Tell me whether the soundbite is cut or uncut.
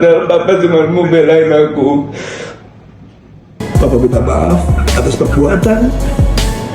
cut